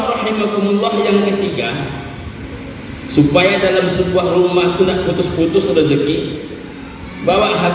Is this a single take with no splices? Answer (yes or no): yes